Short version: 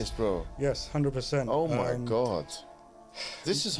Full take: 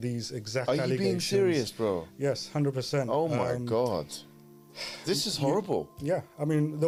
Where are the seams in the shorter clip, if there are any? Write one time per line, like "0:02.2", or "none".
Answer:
none